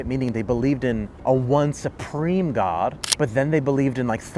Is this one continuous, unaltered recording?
no; 2 cuts; at 1.1 s, 3.0 s

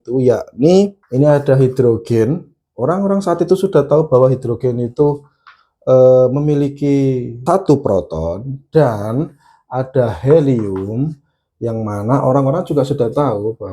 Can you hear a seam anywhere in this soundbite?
yes; 2 cuts; at 1.0 s, 7.4 s

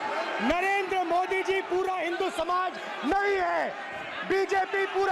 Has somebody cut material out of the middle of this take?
no; 0 cuts

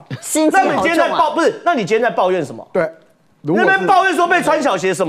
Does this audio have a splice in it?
no; 0 cuts

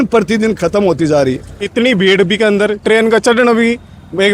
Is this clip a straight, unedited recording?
no; 1 cut; at 1.6 s

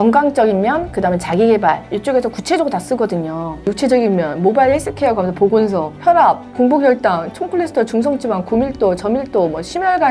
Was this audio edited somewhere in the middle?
yes; 2 cuts; at 3.7 s, 6.3 s

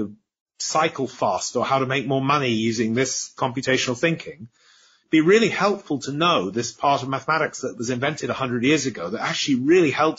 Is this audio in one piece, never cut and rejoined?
no; 1 cut; at 3.3 s

